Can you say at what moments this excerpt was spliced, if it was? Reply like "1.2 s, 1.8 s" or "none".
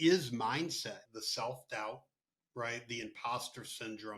1.1 s